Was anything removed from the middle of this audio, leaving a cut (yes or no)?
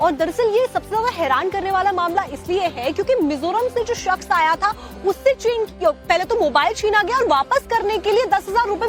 no